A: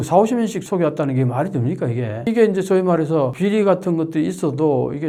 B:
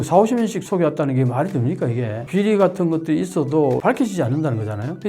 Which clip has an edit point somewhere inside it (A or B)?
B